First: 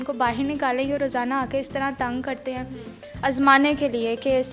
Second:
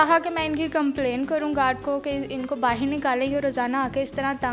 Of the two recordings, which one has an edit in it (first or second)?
first